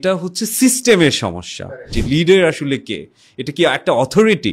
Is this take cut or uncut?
cut